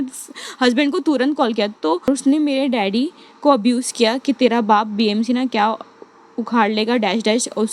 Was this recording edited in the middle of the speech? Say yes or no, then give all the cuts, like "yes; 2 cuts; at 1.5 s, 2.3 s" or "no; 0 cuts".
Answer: yes; 1 cut; at 2.1 s